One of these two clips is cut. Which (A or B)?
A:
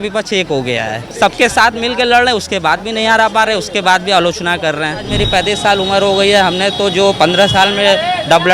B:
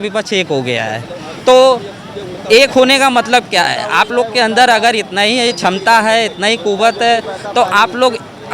A